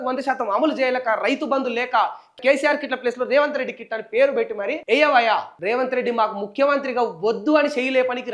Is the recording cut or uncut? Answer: cut